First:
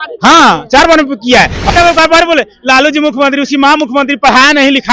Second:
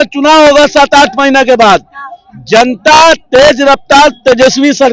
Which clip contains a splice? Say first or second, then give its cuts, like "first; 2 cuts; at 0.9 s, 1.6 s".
first; 1 cut; at 1.7 s